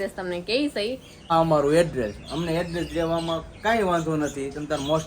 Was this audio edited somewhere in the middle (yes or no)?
yes